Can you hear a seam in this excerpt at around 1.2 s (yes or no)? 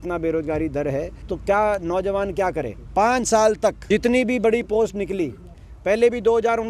yes